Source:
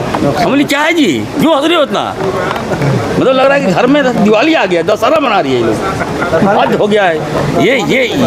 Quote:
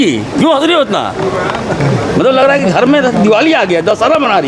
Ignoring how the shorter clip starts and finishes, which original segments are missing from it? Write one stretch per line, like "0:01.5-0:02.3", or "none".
none

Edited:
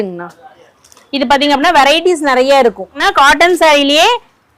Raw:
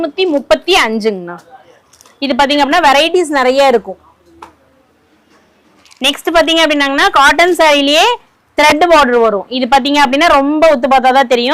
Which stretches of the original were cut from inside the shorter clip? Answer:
0:04.0-0:06.9

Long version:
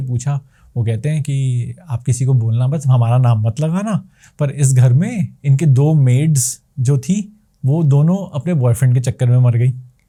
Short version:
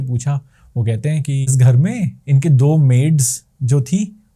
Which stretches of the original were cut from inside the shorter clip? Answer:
0:01.5-0:04.7

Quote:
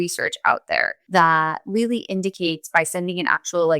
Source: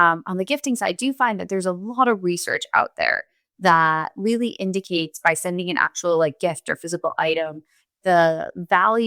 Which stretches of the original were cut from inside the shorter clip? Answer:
0:03.2-0:03.5

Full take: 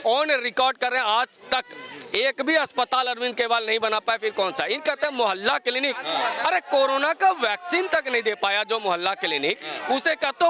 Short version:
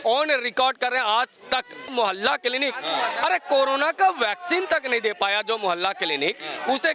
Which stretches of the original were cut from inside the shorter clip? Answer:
0:01.9-0:05.1

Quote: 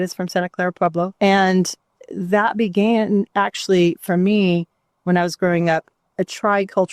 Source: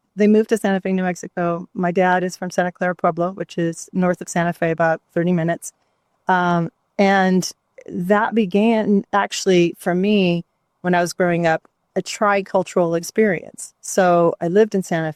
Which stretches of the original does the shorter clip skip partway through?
0:03.3-0:06.9

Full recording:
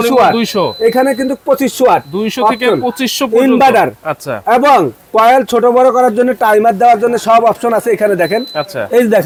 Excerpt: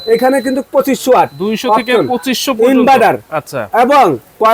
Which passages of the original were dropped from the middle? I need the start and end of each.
none

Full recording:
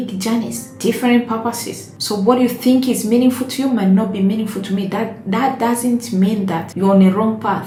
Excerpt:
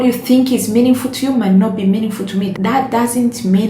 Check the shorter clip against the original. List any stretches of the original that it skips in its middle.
0:04.9-0:05.2

